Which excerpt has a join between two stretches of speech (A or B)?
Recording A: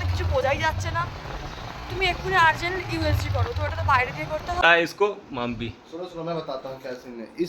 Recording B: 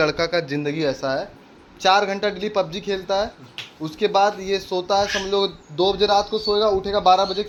A